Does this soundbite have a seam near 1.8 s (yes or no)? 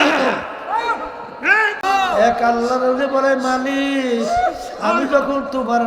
yes